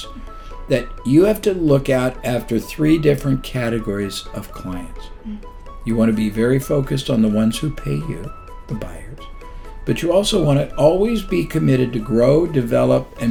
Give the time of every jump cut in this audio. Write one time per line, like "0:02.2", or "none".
none